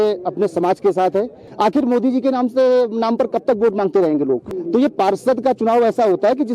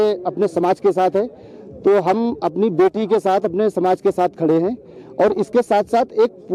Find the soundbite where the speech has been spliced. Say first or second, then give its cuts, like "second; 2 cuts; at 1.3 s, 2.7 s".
first; 2 cuts; at 1.4 s, 4.5 s